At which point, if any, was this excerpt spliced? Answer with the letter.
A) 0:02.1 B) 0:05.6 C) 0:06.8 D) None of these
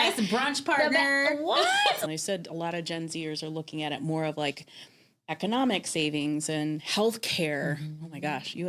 A